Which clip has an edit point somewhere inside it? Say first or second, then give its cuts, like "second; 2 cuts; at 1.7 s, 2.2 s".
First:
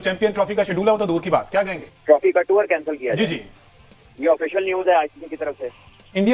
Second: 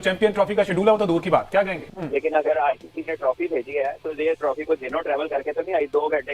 second; 1 cut; at 1.9 s